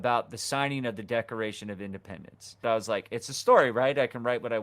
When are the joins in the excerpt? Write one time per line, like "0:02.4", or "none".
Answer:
0:02.6